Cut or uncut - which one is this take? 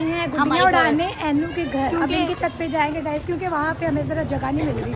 uncut